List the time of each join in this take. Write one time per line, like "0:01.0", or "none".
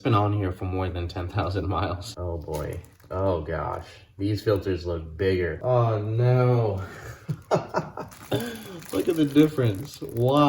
0:02.1
0:05.6